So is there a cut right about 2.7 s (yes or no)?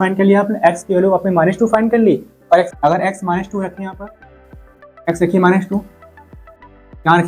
yes